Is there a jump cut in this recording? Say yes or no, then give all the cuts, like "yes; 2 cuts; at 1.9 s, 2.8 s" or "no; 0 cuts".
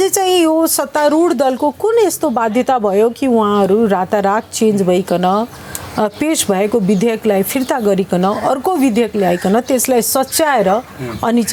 no; 0 cuts